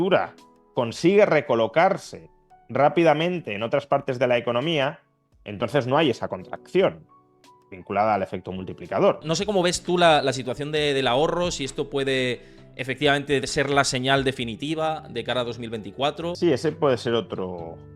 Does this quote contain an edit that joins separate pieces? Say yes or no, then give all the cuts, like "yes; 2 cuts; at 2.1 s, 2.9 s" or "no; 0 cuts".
yes; 2 cuts; at 9.2 s, 16.3 s